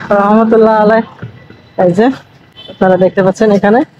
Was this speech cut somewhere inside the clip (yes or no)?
no